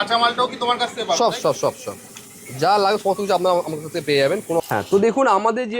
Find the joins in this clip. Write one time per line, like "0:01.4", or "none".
0:04.6